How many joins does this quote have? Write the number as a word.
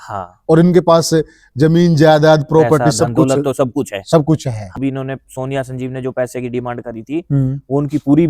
one